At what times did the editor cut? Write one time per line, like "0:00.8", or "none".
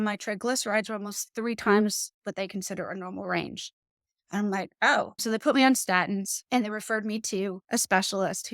0:05.2
0:06.4
0:07.6